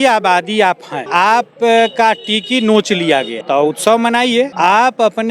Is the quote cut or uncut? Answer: cut